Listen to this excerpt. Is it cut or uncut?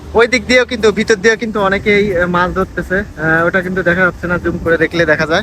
uncut